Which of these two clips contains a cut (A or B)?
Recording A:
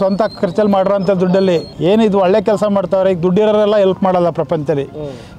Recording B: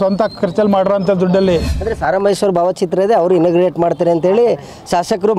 B